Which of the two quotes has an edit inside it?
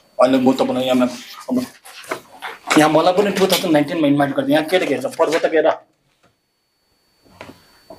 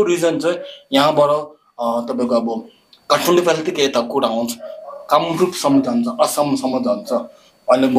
first; 1 cut; at 1.8 s

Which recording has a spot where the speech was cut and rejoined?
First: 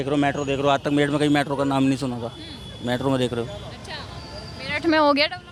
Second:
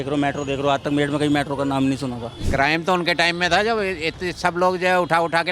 second; 1 cut; at 2.3 s

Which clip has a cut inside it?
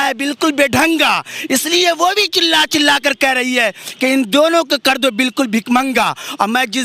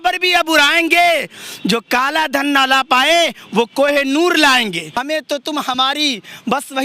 second; 1 cut; at 4.9 s

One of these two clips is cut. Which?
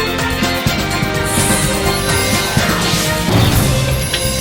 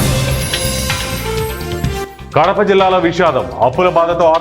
second; 1 cut; at 2.0 s

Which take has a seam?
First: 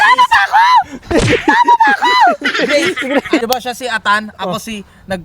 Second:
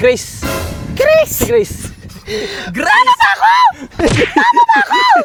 first; 1 cut; at 3.4 s

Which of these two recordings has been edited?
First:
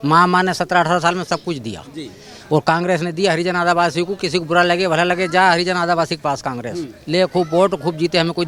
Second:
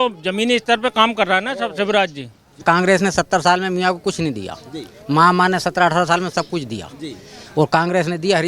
second; 1 cut; at 2.6 s

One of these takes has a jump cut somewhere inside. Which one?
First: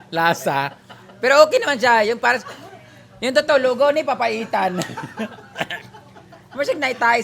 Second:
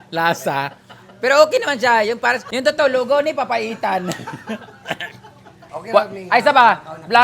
second; 2 cuts; at 2.5 s, 5.6 s

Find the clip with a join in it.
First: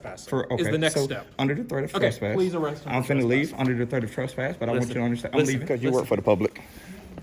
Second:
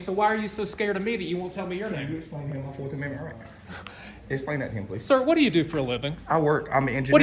first; 1 cut; at 5.7 s

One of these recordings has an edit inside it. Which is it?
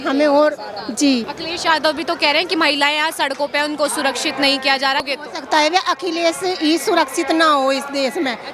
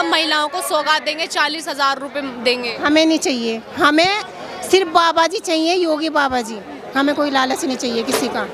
first; 2 cuts; at 1.4 s, 5.1 s

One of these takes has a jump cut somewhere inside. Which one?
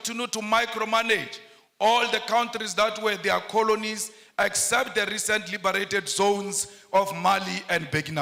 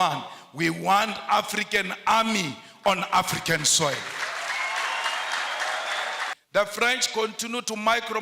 second; 1 cut; at 6.3 s

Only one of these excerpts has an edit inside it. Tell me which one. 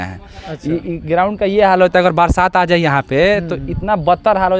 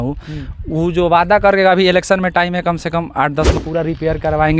second; 1 cut; at 3.6 s

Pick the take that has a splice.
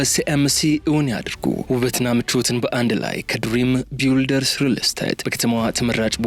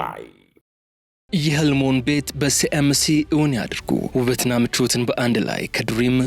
second; 1 cut; at 1.2 s

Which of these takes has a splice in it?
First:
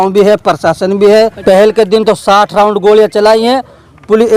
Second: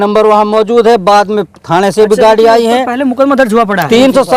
first; 1 cut; at 1.4 s

